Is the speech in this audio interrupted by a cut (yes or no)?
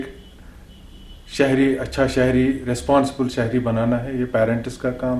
no